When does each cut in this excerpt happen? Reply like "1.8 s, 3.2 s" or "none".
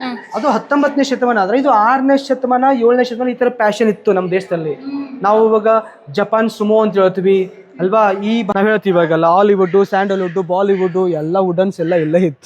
8.5 s